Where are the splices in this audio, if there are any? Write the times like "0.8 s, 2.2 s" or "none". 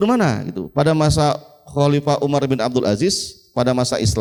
none